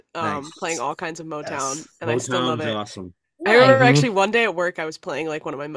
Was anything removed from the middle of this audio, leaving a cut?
no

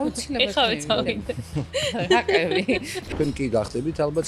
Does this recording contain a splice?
yes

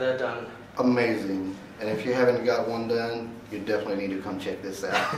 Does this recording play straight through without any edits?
yes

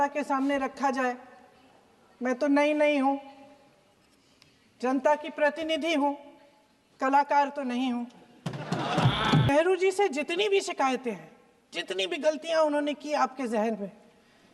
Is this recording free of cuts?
no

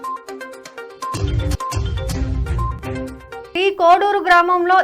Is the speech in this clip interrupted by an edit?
yes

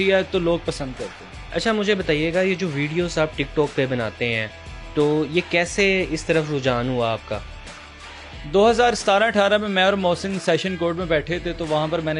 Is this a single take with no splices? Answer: yes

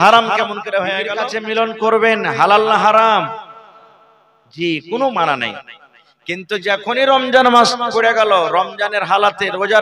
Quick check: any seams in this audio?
yes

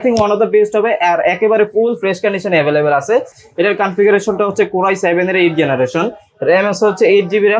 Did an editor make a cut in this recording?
no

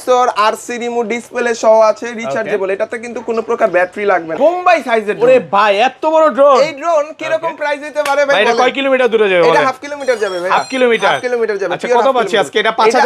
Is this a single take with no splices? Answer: no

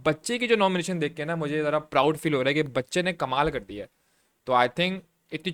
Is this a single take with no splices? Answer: yes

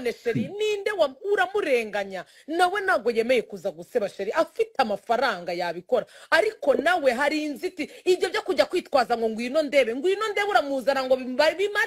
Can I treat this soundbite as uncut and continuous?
yes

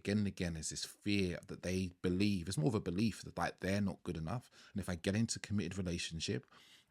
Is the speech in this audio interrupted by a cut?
no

